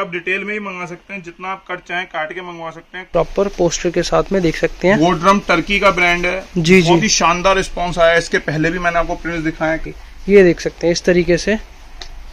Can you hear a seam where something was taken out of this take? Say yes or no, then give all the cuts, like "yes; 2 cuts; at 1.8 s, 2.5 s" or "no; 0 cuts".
yes; 2 cuts; at 3.1 s, 9.8 s